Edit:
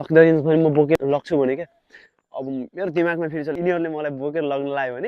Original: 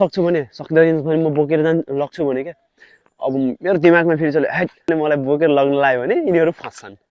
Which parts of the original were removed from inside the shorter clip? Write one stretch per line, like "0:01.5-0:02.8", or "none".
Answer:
0:01.6-0:01.8
0:04.5-0:04.7